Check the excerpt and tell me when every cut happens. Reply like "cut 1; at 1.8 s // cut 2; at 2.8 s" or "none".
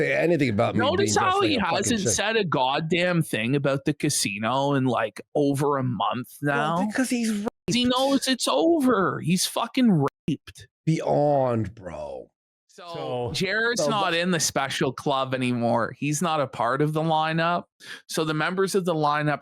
cut 1; at 12.9 s